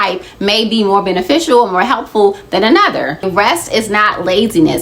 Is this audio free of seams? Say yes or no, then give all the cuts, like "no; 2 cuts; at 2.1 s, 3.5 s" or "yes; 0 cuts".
no; 1 cut; at 3.3 s